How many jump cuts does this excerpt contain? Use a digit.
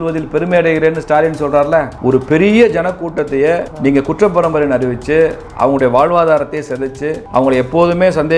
2